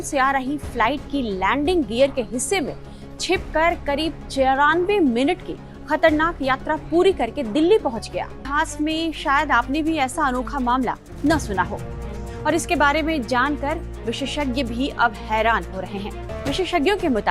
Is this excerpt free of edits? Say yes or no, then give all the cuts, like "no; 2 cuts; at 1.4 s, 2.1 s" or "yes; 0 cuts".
no; 2 cuts; at 8.5 s, 16.3 s